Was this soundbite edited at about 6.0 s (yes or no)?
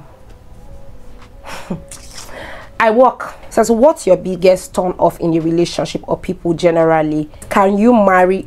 no